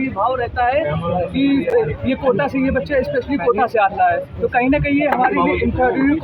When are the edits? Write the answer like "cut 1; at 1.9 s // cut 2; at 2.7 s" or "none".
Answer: none